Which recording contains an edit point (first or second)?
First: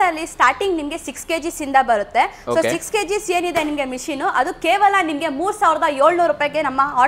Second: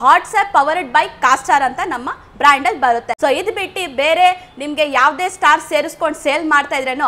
second